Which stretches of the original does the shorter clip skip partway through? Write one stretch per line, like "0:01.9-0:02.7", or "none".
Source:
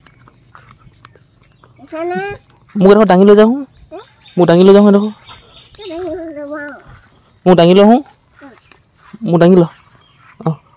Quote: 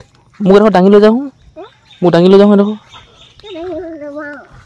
none